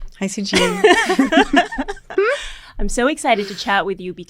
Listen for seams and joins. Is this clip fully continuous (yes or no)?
yes